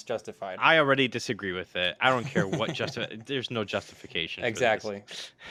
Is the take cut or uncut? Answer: uncut